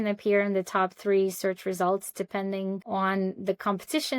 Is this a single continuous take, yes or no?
no